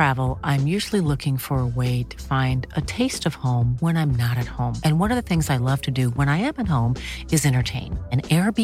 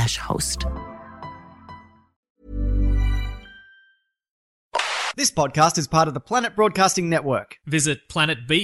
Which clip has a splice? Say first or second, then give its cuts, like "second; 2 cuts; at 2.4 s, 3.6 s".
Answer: second; 2 cuts; at 2.3 s, 4.6 s